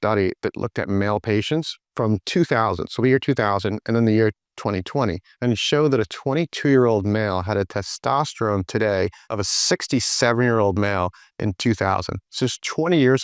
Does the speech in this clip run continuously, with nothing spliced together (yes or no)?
no